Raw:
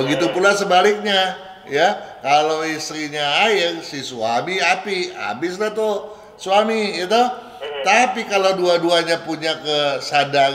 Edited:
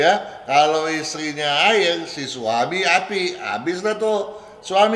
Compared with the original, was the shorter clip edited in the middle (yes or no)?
no